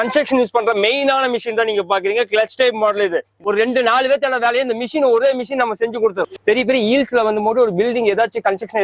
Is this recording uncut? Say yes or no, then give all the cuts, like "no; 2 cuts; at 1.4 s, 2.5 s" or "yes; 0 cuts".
no; 2 cuts; at 3.3 s, 6.2 s